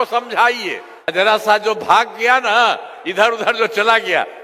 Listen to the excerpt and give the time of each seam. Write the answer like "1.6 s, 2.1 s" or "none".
1.1 s